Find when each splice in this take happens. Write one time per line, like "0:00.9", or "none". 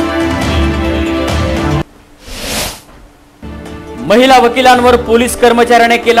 0:01.8